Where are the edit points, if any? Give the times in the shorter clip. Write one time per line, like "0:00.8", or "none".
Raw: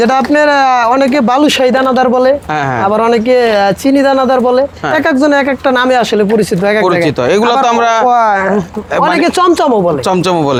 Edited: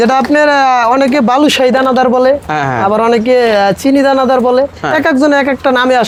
none